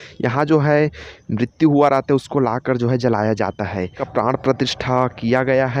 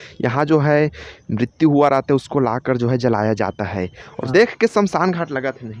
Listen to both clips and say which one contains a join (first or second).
second